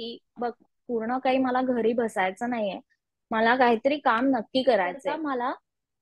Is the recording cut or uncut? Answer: cut